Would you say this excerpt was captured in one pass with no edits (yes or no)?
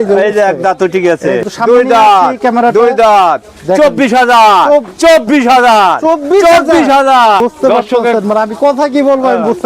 no